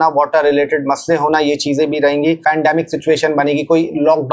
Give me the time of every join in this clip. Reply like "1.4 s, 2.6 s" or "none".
2.4 s